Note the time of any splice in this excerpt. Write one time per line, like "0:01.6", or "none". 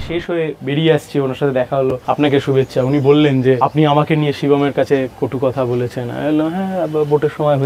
0:02.0
0:03.6

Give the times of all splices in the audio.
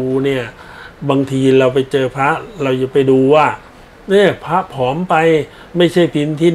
none

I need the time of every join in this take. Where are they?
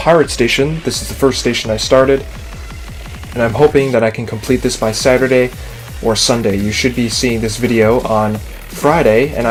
none

